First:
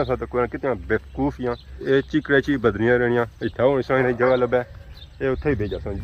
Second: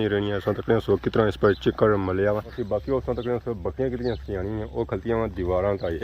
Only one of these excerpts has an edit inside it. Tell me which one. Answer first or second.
second